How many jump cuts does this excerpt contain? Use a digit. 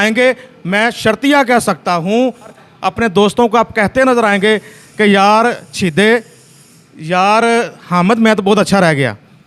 1